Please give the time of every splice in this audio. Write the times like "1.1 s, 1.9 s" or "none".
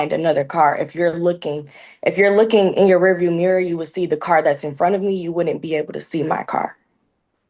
none